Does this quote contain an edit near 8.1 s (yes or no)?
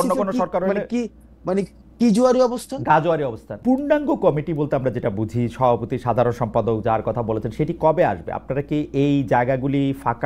no